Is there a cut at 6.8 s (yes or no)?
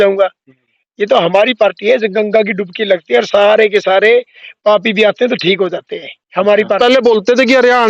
yes